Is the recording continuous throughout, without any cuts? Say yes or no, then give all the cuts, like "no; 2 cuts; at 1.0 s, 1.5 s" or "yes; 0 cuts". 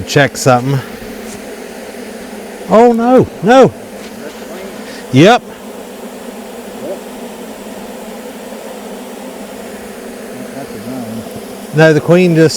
yes; 0 cuts